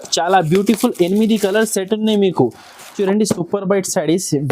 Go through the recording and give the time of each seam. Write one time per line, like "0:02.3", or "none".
0:03.0